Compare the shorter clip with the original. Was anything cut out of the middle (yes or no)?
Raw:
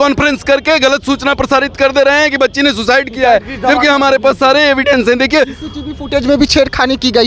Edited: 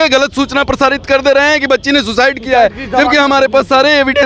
no